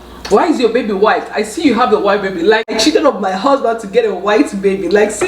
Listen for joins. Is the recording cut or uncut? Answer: cut